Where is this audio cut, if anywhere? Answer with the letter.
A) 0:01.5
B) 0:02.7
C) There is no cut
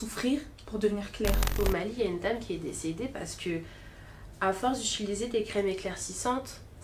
A